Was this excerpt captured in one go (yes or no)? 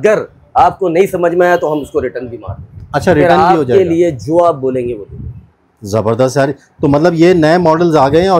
yes